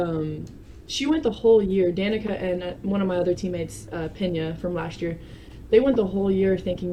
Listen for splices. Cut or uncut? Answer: uncut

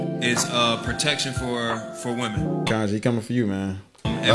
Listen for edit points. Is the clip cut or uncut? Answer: cut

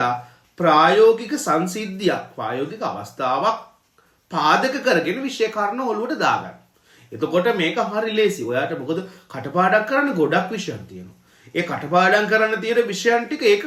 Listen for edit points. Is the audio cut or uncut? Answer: uncut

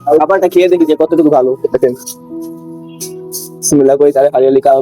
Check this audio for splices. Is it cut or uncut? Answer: cut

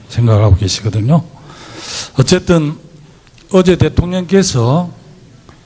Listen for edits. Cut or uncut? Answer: uncut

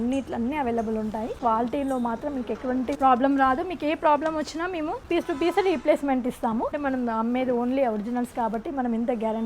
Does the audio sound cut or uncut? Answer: cut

